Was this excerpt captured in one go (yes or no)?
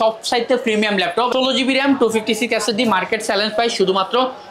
no